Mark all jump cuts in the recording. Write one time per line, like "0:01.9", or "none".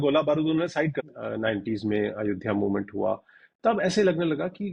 0:01.0